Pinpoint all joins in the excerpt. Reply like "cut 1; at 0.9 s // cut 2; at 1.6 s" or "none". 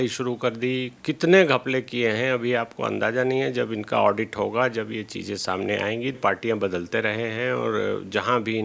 cut 1; at 6.2 s